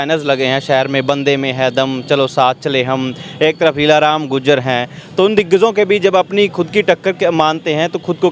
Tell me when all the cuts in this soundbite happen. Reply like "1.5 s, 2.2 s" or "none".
none

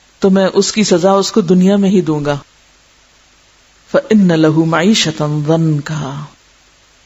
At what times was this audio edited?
3.1 s

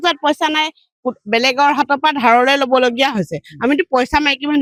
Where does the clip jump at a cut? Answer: none

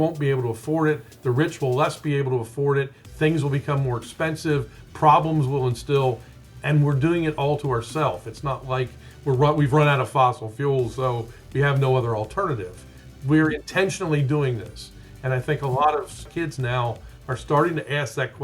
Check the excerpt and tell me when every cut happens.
16.3 s

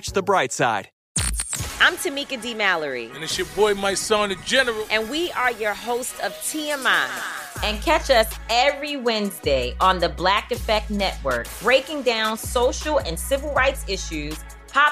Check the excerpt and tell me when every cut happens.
0.9 s

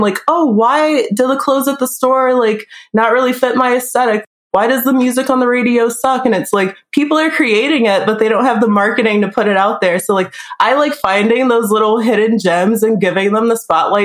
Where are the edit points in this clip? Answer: none

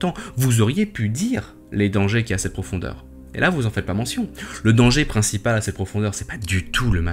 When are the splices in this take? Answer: none

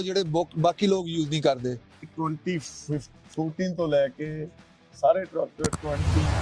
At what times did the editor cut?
2.1 s

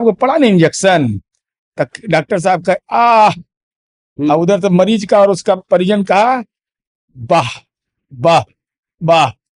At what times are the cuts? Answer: none

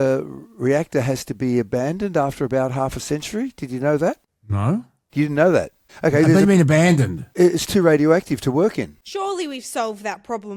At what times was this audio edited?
none

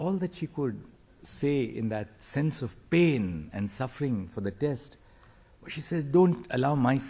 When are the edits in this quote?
none

